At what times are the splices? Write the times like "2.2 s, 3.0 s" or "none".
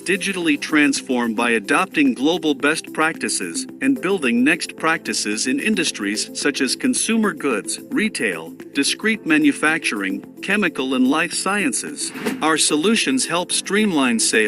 none